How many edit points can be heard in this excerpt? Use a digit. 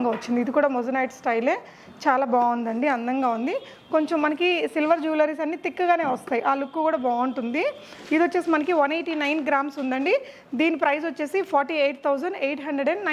0